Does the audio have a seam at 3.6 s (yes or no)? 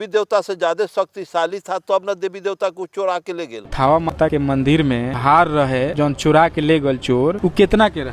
yes